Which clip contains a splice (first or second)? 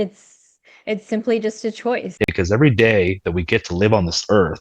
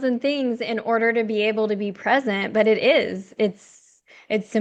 first